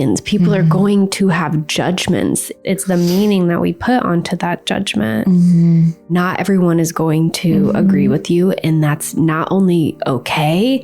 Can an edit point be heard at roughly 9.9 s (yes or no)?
no